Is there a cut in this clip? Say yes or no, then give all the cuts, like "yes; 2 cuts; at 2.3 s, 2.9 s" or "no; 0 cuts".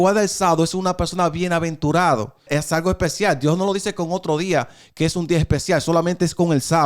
yes; 1 cut; at 2.5 s